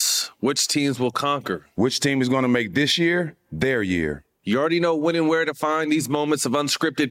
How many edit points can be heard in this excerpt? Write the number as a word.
one